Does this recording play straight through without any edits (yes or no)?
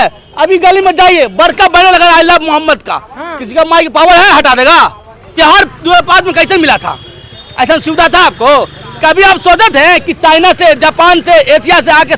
no